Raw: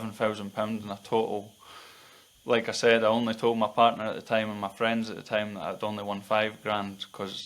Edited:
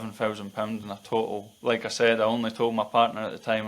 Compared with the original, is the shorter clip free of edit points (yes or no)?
no